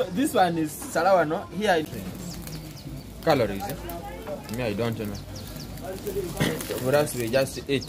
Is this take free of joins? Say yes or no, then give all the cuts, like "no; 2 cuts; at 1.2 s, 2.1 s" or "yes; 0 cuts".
no; 1 cut; at 1.8 s